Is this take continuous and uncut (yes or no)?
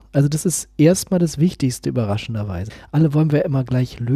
yes